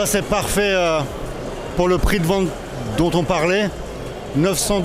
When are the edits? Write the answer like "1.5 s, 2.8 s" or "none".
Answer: none